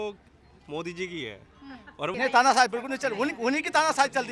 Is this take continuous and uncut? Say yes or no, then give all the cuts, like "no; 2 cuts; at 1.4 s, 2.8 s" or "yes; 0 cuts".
no; 1 cut; at 2.1 s